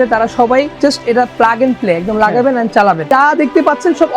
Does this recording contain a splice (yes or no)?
yes